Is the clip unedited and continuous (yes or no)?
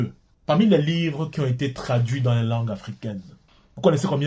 no